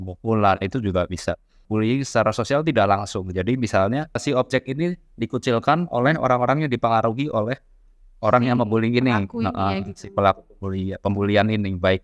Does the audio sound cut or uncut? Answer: cut